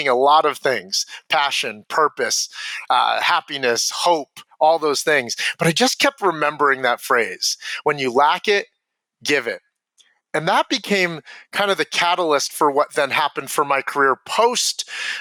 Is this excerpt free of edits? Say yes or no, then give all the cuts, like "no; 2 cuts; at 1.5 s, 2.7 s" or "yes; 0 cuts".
yes; 0 cuts